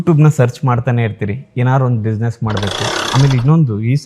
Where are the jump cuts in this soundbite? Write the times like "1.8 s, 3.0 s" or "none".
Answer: 3.0 s